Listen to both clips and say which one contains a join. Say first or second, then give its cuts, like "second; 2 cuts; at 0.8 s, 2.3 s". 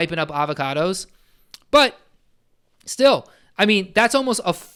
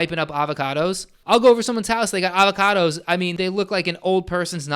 second; 2 cuts; at 1.1 s, 3.3 s